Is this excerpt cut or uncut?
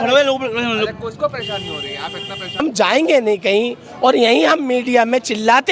cut